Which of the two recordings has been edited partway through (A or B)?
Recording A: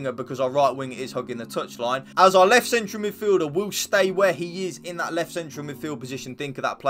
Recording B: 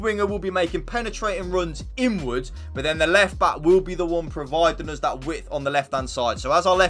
A